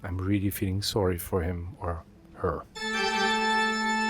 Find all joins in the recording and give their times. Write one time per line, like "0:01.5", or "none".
0:02.7

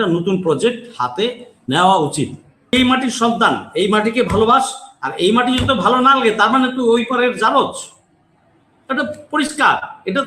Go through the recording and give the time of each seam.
0:02.7

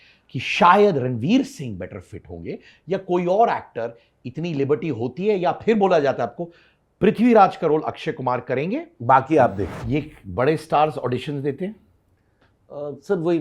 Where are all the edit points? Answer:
0:09.7

